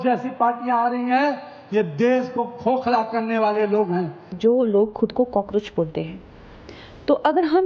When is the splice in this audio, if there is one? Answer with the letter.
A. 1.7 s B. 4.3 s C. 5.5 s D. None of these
B